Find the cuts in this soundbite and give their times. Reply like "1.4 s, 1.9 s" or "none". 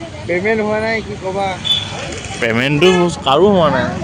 none